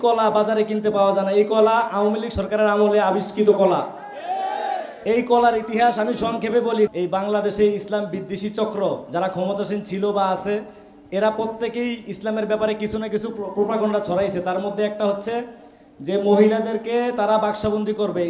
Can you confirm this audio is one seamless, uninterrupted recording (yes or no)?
yes